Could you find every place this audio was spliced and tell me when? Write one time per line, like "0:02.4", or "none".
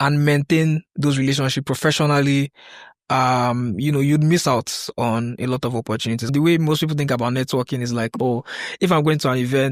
0:06.3